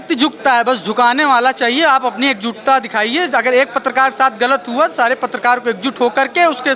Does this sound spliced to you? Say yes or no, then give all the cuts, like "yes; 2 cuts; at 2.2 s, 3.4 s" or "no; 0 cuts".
no; 0 cuts